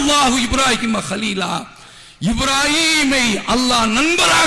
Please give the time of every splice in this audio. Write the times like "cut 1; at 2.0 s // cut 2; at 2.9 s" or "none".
none